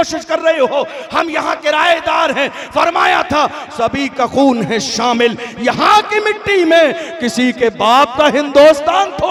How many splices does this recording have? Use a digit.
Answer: 0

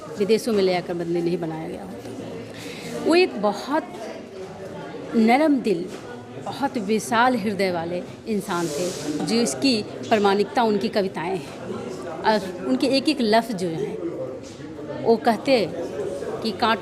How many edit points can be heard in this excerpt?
0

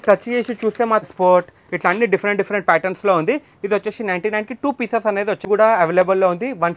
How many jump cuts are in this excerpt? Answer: 2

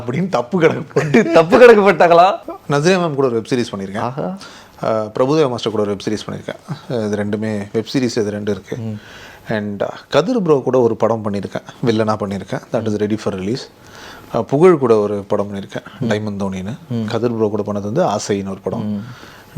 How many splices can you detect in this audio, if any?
1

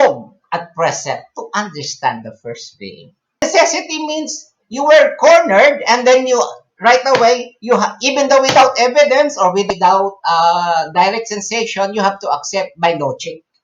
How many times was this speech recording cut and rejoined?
2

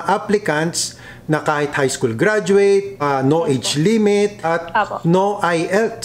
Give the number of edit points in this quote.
2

